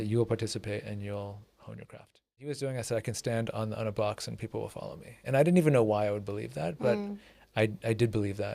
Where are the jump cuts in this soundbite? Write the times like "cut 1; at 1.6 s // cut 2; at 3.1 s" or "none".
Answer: cut 1; at 2.4 s